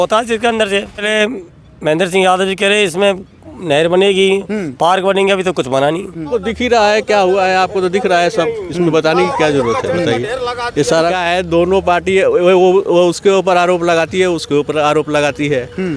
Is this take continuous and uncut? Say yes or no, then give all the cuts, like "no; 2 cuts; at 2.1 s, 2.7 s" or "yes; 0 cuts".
no; 3 cuts; at 1.1 s, 6.3 s, 11.1 s